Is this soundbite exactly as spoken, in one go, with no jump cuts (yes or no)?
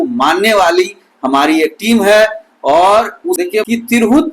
no